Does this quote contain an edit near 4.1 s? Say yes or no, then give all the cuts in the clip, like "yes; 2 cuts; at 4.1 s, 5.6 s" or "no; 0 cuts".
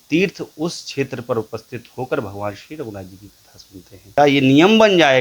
yes; 1 cut; at 4.1 s